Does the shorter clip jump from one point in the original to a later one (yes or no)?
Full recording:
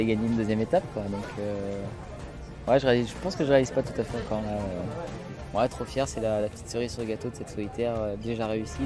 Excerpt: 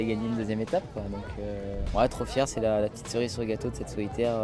yes